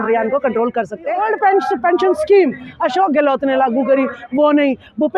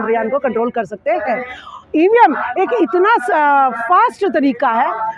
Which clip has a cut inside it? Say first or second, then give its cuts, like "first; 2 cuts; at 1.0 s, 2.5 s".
first; 1 cut; at 1.2 s